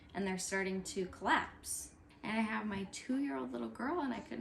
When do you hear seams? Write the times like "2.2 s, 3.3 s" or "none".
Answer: 2.1 s